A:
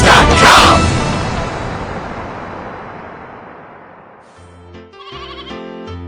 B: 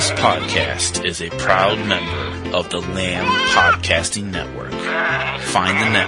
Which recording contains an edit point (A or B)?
A